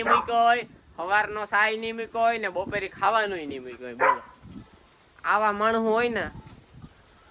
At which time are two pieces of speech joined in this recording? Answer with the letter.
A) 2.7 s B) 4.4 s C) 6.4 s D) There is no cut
B